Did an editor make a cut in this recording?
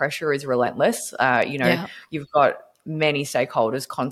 no; 0 cuts

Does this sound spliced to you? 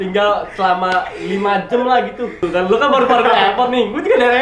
yes; 1 cut; at 2.4 s

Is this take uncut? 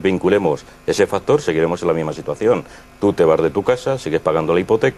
yes; 0 cuts

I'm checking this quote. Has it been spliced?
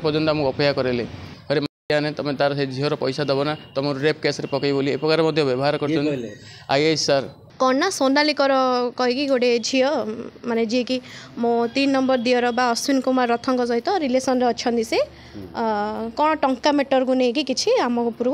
yes; 2 cuts; at 1.3 s, 7.4 s

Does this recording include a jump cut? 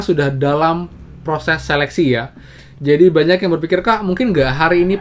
no; 0 cuts

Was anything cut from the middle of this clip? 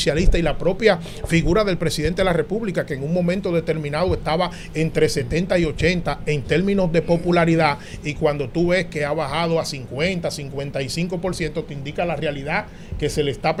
no; 0 cuts

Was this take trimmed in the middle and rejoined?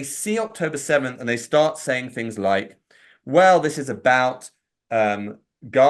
yes; 1 cut; at 1.2 s

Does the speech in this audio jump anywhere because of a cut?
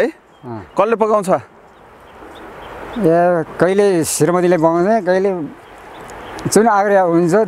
no; 0 cuts

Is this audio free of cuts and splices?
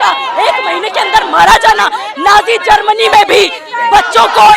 yes; 0 cuts

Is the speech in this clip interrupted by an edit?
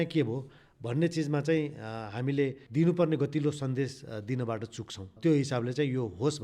yes; 1 cut; at 2.6 s

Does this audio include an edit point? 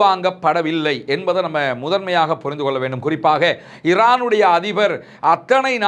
no; 0 cuts

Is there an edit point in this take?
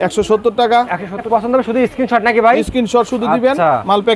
yes; 1 cut; at 1.3 s

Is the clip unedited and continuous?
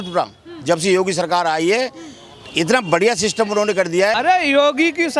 no; 1 cut; at 4.2 s

